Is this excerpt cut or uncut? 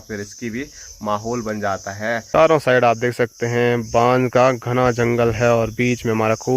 cut